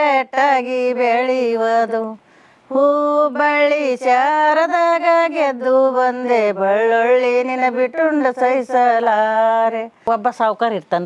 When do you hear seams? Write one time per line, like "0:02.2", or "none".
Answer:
0:10.1